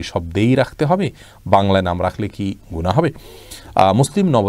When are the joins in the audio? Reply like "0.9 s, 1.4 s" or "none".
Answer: none